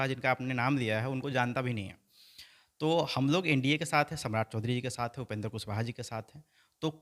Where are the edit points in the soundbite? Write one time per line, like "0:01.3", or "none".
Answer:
none